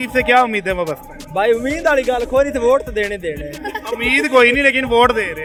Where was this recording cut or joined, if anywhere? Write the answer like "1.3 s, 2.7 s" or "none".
none